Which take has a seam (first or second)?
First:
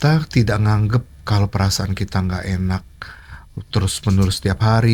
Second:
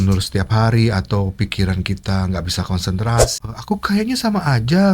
second